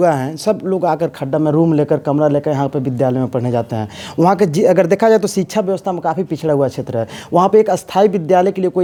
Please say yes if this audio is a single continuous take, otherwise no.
yes